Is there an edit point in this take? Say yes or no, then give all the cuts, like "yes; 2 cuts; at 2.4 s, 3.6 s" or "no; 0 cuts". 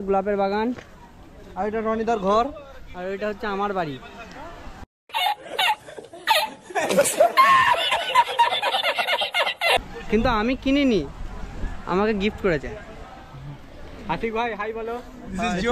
no; 0 cuts